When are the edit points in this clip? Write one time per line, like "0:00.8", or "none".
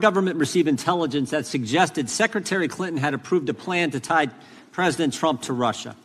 none